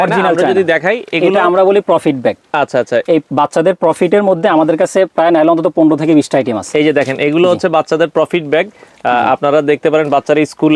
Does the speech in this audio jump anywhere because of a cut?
no; 0 cuts

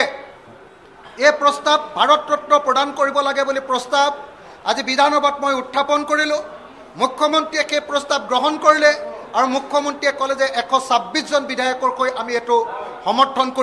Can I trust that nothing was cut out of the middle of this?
yes; 0 cuts

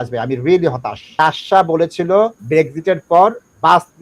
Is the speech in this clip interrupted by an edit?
yes; 2 cuts; at 1.0 s, 2.4 s

